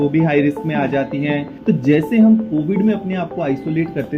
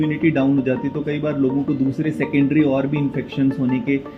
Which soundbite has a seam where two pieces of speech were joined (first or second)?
first